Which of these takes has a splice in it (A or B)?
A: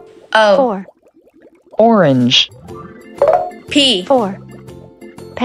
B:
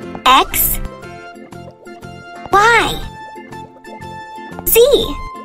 B